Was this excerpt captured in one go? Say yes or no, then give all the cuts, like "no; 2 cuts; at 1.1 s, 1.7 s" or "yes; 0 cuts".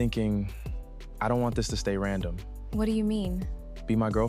yes; 0 cuts